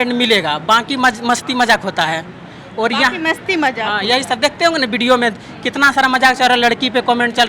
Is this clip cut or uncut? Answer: uncut